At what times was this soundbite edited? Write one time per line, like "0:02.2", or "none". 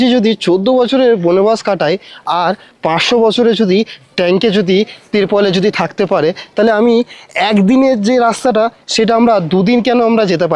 none